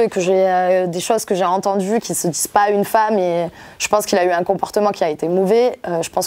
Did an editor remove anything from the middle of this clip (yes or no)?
no